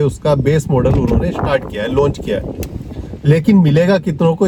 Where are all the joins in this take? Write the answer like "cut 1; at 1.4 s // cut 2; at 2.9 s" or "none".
none